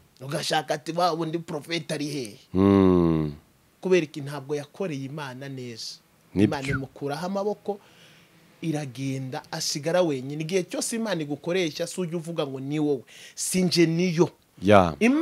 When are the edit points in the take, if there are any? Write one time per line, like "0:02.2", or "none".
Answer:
none